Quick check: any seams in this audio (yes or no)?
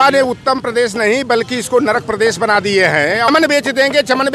yes